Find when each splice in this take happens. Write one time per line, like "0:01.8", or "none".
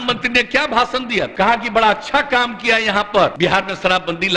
0:03.3